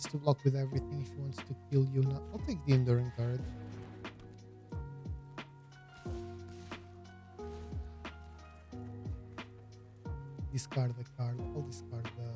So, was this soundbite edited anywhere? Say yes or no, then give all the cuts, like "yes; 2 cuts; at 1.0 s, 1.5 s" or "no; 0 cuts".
yes; 3 cuts; at 4.0 s, 7.3 s, 10.4 s